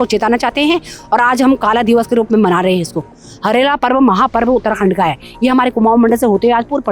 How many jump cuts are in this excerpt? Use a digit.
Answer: 0